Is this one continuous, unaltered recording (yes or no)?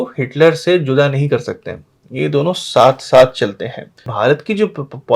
no